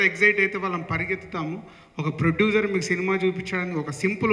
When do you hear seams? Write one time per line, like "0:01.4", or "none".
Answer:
none